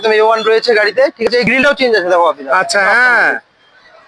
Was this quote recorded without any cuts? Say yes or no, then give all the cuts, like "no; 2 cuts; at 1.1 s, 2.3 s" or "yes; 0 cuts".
yes; 0 cuts